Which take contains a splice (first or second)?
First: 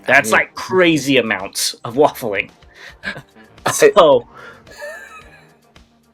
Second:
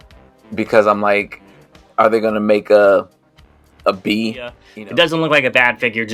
second